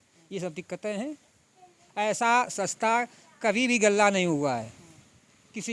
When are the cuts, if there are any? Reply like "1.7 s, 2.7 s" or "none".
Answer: none